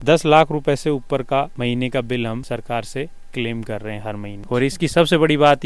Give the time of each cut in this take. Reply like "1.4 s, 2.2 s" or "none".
4.4 s

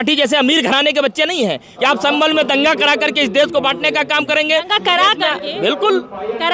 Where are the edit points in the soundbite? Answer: 1.7 s

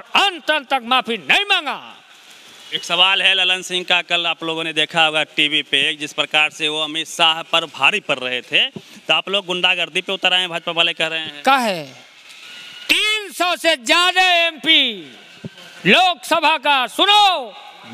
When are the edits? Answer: none

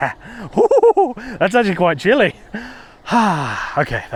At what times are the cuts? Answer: none

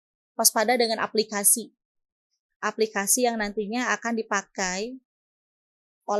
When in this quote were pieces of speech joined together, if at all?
none

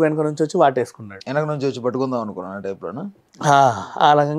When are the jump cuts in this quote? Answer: none

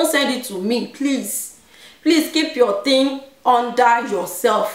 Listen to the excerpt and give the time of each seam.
none

